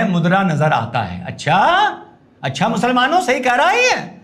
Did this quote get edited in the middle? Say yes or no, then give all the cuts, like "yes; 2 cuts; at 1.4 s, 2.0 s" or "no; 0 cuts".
no; 0 cuts